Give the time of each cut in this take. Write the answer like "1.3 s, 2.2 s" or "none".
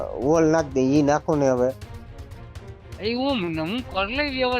none